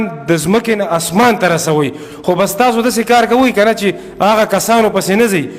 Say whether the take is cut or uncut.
uncut